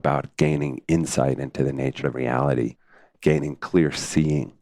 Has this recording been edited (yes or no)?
yes